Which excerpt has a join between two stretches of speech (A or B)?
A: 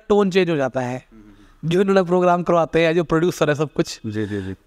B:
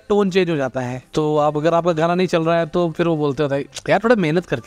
B